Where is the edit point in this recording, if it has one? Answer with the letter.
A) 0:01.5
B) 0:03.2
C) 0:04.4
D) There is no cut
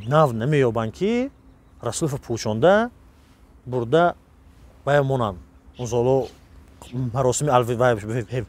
D